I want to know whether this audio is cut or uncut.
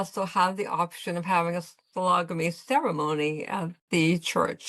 uncut